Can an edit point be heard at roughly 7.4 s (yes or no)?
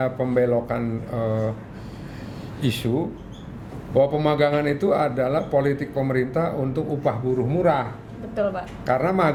no